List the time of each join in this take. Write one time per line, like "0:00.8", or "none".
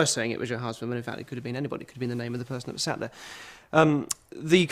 0:03.8